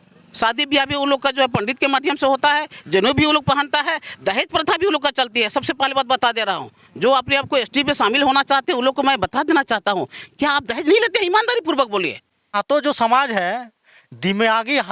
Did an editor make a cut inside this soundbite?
yes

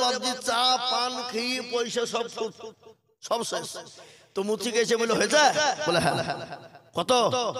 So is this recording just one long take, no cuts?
yes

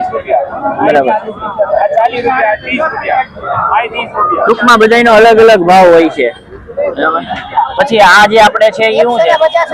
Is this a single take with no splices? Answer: yes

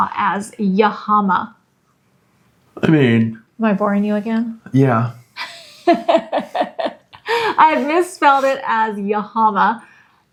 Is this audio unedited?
yes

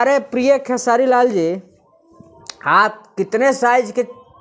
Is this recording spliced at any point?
no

